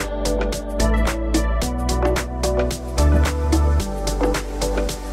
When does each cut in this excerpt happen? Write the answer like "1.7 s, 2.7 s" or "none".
none